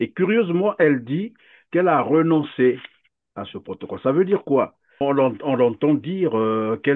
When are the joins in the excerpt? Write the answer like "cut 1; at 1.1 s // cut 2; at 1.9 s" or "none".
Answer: cut 1; at 5.0 s